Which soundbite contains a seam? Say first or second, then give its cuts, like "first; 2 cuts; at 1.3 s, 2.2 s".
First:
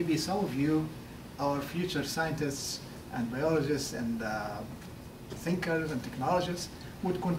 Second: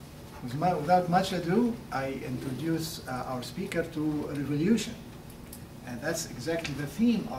second; 1 cut; at 6.5 s